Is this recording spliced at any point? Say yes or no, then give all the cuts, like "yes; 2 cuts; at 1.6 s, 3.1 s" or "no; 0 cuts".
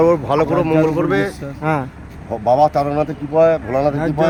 no; 0 cuts